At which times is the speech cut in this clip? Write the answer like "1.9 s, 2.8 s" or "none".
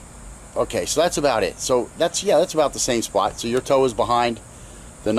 1.4 s